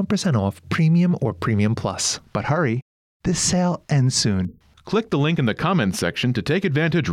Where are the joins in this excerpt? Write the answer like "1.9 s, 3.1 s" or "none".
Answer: 2.1 s